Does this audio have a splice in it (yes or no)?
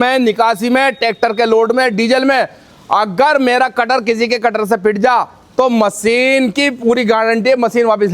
no